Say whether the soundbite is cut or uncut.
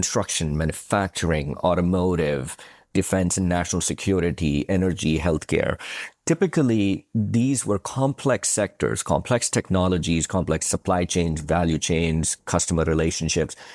cut